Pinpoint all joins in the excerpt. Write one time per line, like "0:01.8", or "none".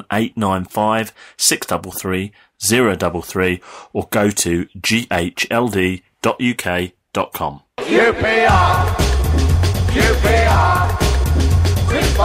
0:07.7